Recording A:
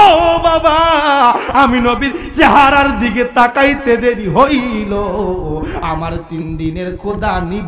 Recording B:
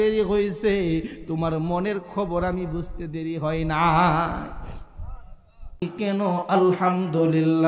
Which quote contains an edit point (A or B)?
B